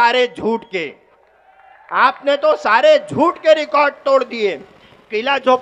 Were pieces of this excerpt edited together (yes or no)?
no